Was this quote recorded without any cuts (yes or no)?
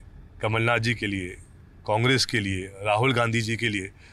yes